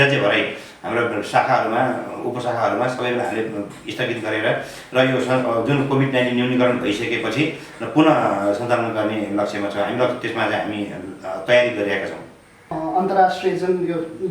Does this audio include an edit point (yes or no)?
yes